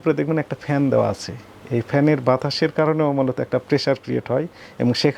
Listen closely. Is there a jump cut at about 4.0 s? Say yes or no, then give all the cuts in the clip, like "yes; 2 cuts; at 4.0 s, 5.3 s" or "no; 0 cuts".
no; 0 cuts